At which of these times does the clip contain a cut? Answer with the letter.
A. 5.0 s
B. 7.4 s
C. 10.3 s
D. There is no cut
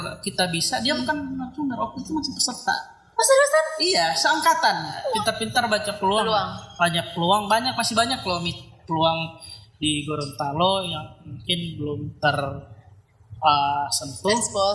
A